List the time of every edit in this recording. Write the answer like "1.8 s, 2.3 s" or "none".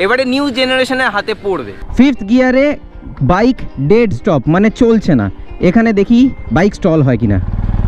1.8 s